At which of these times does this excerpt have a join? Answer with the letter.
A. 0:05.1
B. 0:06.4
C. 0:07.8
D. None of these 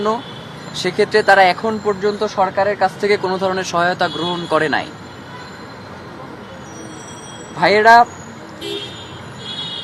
D